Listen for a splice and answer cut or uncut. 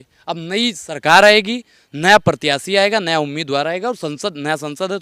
uncut